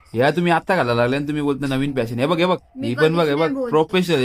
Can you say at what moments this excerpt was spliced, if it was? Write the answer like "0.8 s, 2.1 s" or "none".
none

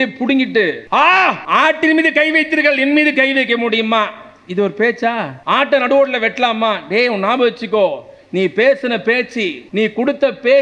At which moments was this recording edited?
0.8 s, 1.4 s, 5.3 s, 9.6 s

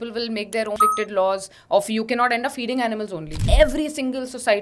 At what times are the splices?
0.8 s, 3.4 s

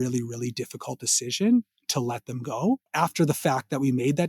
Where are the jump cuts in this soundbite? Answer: 2.9 s

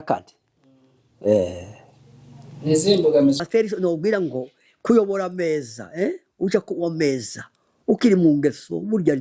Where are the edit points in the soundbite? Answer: 3.4 s

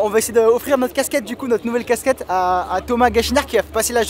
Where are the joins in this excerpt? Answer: none

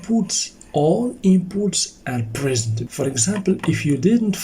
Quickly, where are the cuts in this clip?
2.8 s

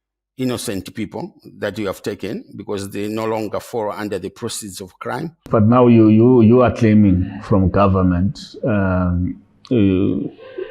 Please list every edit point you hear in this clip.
5.3 s

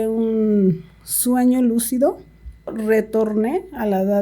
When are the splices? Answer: 2.8 s

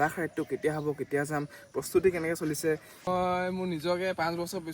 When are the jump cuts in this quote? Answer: 3.1 s

